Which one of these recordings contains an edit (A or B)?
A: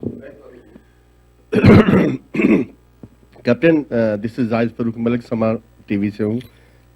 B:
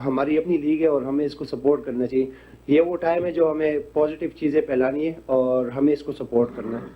A